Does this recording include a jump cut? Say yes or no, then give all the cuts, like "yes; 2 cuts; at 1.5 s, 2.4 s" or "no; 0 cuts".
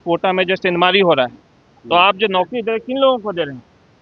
no; 0 cuts